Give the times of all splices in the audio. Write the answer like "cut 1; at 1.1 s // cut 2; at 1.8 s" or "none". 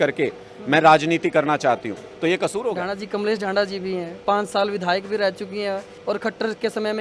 cut 1; at 2.8 s // cut 2; at 4.1 s // cut 3; at 5.9 s